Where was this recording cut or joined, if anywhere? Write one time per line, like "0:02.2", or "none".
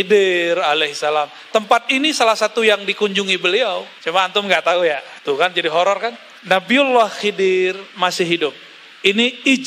0:03.9
0:05.1
0:06.3